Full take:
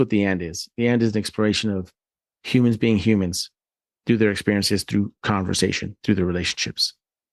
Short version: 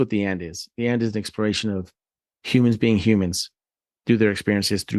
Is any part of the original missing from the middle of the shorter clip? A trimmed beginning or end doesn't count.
no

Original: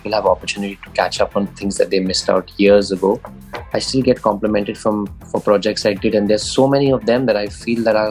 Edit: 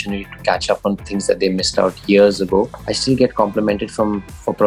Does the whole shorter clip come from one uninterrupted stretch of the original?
no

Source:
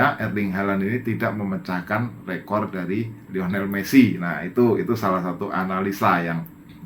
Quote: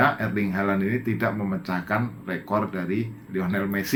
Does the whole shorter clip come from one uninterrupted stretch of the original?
yes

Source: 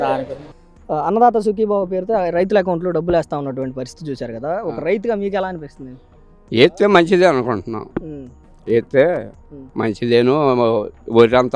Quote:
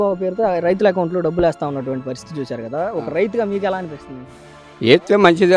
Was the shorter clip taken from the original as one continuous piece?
yes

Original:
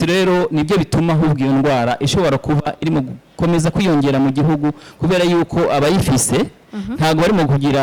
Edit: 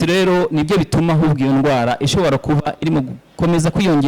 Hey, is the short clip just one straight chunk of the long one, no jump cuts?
yes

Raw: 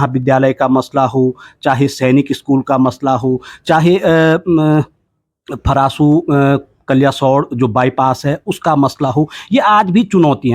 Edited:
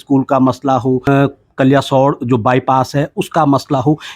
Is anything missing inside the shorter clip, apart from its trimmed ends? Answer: yes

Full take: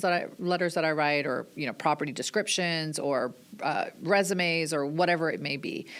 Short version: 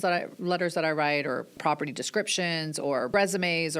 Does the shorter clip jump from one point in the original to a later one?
yes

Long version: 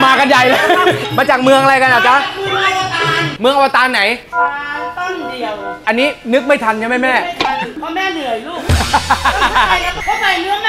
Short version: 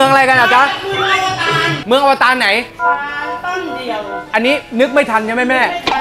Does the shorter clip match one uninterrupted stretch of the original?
yes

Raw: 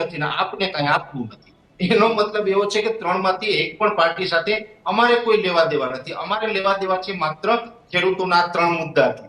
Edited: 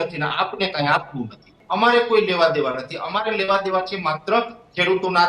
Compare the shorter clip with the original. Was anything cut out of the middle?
yes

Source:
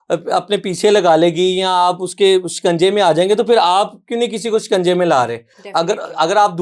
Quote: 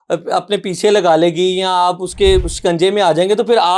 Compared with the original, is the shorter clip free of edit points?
yes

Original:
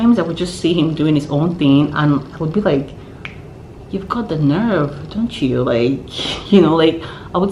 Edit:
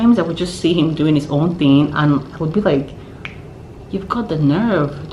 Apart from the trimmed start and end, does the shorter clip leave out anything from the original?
no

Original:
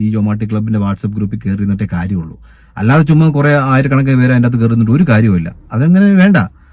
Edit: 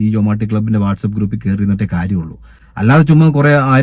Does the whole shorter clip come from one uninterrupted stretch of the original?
yes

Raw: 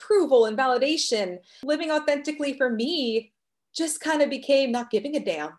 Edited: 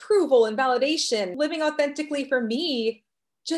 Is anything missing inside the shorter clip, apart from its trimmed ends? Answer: yes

